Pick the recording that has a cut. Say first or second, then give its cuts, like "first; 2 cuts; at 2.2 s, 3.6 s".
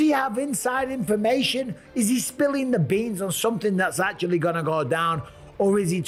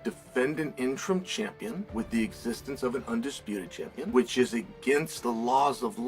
second; 3 cuts; at 1.8 s, 4.1 s, 5.1 s